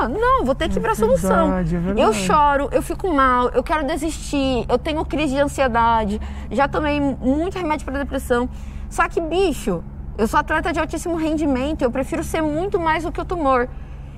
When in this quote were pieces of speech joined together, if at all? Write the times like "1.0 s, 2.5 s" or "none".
none

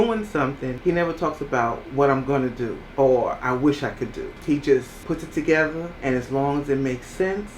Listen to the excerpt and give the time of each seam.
0.8 s, 2.8 s, 4.3 s, 4.9 s, 5.9 s

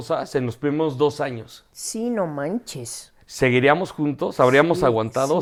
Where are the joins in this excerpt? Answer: none

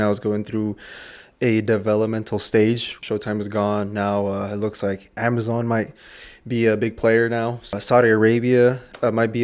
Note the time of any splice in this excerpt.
2.9 s, 7.7 s

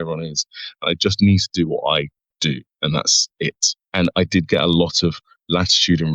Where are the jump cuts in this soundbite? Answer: 3.9 s

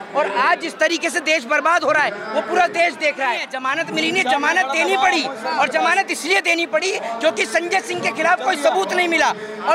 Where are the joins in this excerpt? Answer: 3.5 s

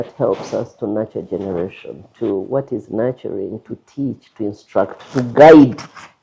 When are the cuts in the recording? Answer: none

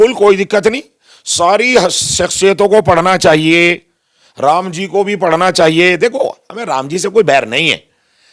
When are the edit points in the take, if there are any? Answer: none

